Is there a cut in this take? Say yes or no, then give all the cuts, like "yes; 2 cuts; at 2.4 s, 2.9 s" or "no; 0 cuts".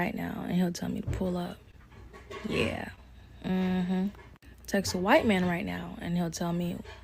no; 0 cuts